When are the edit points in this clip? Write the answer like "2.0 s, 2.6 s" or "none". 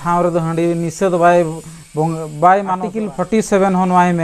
2.9 s